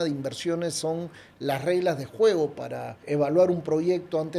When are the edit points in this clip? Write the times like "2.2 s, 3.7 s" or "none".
2.9 s